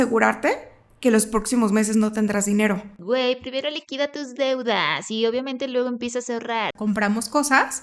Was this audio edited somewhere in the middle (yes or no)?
yes